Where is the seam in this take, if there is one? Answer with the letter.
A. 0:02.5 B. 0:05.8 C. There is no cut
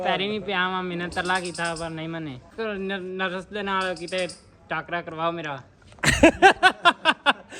A